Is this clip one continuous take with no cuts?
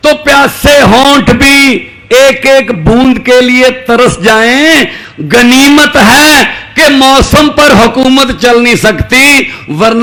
yes; 0 cuts

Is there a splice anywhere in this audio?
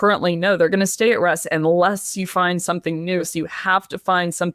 yes; 1 cut; at 3.3 s

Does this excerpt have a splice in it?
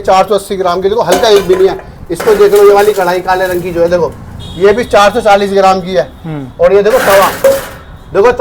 no; 0 cuts

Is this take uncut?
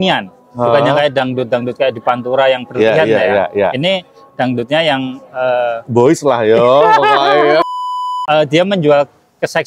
no; 1 cut; at 7.7 s

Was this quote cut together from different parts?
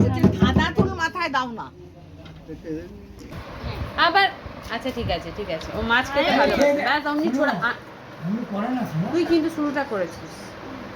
yes; 1 cut; at 3.3 s

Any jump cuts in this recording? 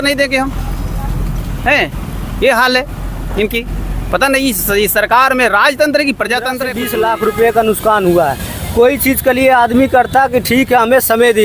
yes; 1 cut; at 6.7 s

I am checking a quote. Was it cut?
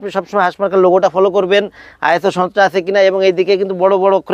no; 0 cuts

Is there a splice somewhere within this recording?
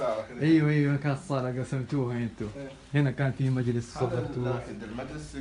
no; 0 cuts

